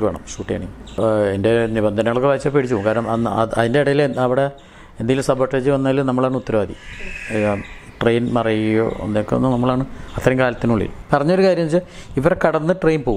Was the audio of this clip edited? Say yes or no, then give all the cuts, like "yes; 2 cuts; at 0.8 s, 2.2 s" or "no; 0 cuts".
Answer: yes; 2 cuts; at 1.0 s, 11.0 s